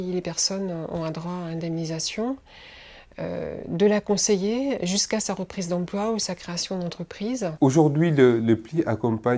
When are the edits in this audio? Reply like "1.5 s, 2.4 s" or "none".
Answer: 7.5 s